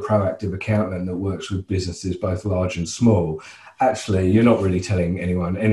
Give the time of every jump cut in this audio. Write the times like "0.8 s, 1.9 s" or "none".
none